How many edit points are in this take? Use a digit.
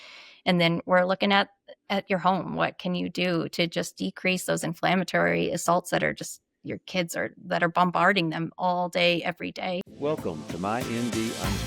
1